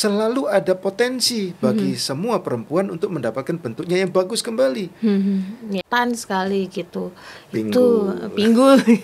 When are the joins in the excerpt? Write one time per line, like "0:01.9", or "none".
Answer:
0:05.8